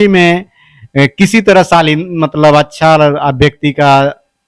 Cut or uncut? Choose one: uncut